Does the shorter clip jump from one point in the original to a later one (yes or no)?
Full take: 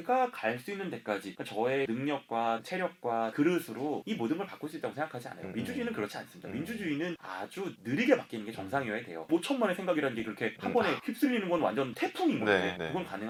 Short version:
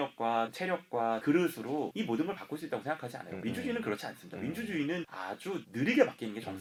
no